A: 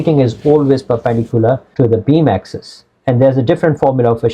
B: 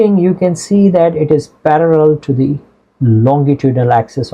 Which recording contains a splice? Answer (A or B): A